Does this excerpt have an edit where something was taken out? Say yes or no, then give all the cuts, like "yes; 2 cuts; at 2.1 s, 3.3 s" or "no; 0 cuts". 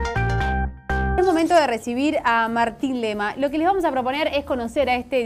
yes; 1 cut; at 1.1 s